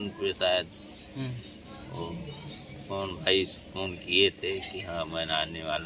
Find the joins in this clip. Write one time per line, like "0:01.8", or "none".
none